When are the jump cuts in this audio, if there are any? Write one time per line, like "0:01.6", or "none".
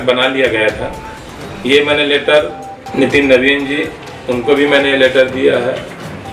0:02.6